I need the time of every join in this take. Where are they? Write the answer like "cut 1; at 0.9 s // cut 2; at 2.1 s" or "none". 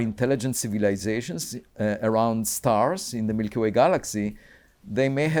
none